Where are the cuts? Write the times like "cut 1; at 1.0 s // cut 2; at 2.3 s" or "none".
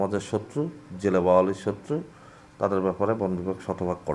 none